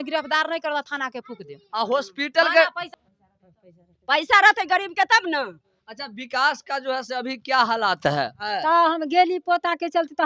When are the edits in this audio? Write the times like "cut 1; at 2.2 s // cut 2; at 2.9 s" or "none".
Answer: cut 1; at 2.8 s // cut 2; at 8.4 s